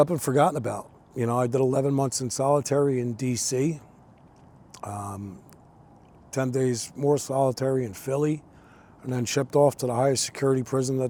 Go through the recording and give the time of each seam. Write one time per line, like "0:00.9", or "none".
none